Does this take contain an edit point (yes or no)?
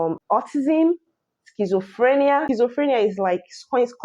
yes